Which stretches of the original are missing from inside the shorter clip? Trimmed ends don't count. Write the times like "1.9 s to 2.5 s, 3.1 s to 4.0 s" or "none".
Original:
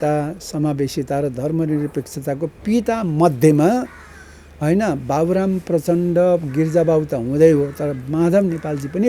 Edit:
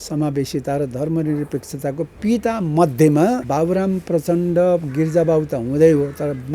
3.9 s to 5.0 s